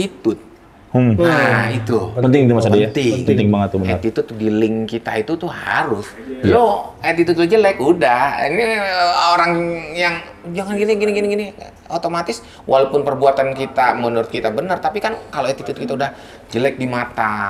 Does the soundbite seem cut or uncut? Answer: uncut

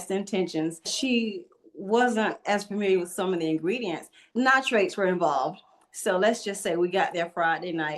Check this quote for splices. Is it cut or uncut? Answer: cut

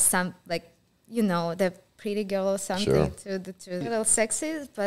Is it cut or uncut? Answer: cut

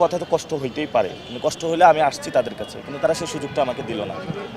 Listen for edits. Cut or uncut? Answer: uncut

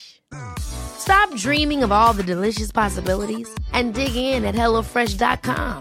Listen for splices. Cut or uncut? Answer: uncut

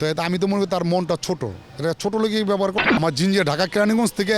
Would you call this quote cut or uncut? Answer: cut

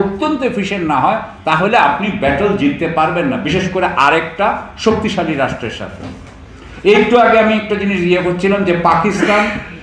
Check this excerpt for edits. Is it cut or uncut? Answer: uncut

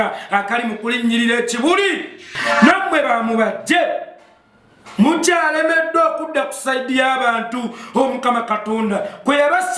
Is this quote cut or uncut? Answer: cut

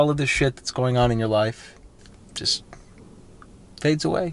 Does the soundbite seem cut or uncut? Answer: cut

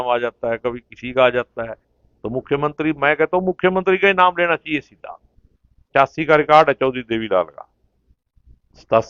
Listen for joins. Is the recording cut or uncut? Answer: cut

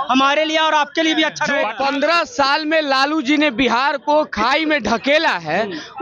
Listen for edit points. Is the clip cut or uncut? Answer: cut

